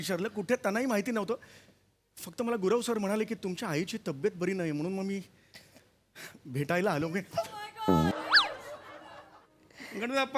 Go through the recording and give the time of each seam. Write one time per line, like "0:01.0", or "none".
0:08.1